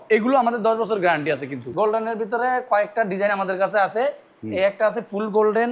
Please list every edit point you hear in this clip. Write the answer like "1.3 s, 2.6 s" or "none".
1.6 s